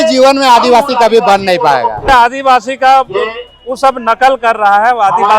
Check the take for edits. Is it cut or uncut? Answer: cut